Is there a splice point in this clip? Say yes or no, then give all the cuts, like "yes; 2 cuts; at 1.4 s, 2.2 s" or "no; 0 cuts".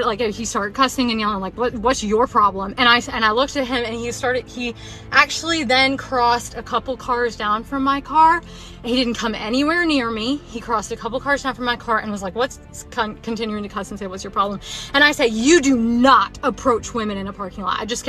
yes; 1 cut; at 9.8 s